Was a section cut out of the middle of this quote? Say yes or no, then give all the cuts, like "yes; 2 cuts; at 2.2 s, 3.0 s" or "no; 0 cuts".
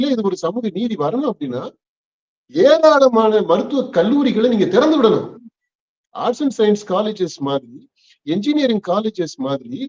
no; 0 cuts